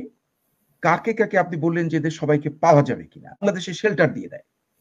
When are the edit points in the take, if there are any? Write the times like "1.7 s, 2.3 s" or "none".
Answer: 3.4 s